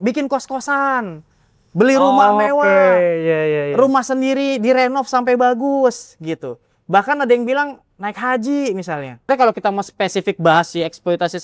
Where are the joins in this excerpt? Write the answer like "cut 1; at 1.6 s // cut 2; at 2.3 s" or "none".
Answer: cut 1; at 9.3 s

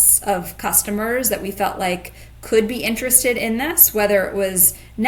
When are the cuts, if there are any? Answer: none

